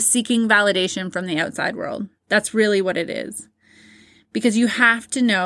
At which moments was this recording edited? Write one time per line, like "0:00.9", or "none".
none